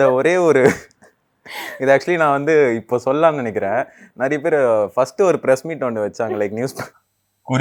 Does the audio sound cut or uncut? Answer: uncut